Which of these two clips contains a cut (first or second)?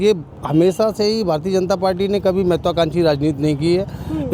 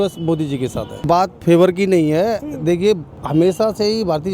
second